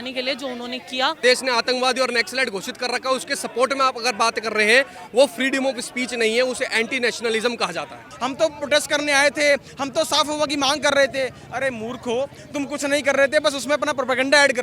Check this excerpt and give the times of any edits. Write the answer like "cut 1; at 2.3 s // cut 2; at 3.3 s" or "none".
cut 1; at 1.2 s // cut 2; at 8.1 s